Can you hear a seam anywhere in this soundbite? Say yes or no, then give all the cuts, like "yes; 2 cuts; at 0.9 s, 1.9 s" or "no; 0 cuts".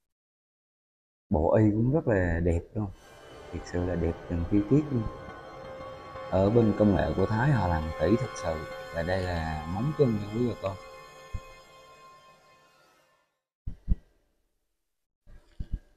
no; 0 cuts